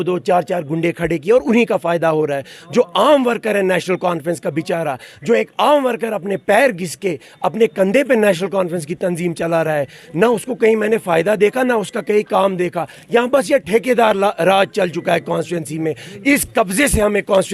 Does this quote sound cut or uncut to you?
uncut